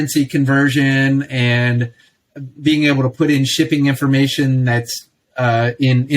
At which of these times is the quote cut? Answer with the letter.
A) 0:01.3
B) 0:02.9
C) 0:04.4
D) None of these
D